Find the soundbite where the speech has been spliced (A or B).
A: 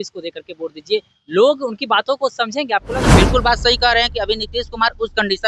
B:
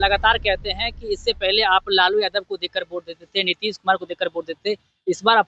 A